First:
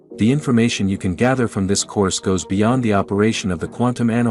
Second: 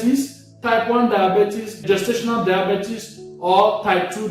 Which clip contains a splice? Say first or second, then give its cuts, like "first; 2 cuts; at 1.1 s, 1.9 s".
second; 1 cut; at 1.8 s